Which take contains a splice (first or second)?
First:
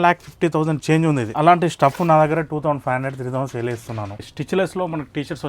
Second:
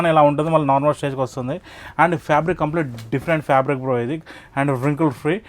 first